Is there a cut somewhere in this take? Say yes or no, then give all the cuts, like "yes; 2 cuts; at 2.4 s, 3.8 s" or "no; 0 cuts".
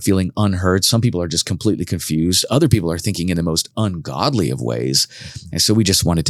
no; 0 cuts